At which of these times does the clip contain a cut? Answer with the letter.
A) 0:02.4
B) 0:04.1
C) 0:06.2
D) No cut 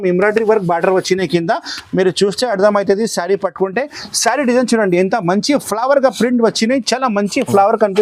D